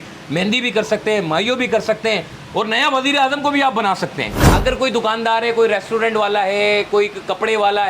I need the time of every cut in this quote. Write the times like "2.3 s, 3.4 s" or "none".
4.3 s